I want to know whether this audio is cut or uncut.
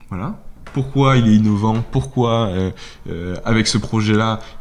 uncut